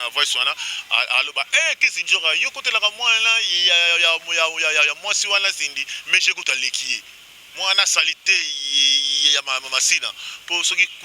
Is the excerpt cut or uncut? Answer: uncut